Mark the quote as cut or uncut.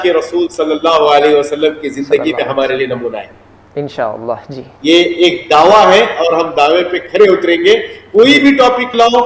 uncut